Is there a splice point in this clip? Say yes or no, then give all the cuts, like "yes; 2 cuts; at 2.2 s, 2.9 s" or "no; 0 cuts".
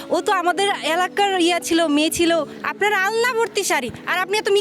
yes; 1 cut; at 2.5 s